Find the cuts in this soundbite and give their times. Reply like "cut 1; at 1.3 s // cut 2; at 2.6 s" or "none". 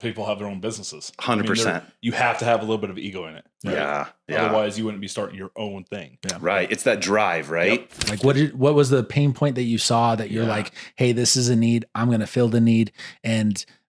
cut 1; at 7.9 s